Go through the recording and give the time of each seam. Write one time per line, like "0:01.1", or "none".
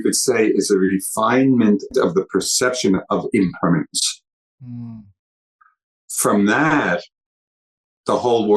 0:01.9